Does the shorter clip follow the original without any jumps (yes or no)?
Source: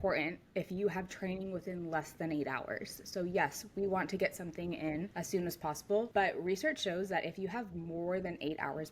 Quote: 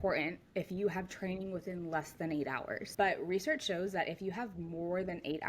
no